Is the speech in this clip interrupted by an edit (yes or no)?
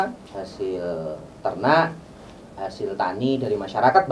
yes